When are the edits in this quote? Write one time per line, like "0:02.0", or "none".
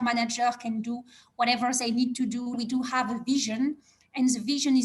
0:02.6